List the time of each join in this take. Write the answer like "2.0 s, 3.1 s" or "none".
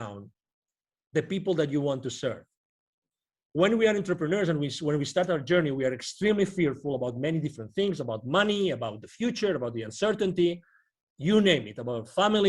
none